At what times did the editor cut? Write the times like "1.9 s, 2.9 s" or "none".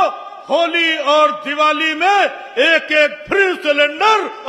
none